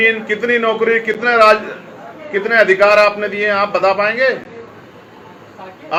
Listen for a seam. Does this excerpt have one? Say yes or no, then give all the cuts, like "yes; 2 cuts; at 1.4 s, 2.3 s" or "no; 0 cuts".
no; 0 cuts